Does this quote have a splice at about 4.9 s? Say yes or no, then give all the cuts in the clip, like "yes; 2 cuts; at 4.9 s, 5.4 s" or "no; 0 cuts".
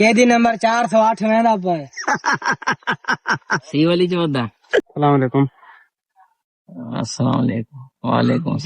yes; 1 cut; at 4.9 s